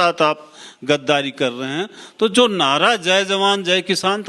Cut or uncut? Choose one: uncut